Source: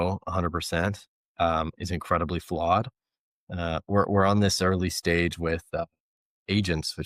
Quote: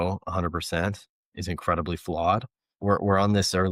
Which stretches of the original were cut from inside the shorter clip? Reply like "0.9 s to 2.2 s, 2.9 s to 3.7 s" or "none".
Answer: 1.3 s to 1.7 s, 3.2 s to 3.8 s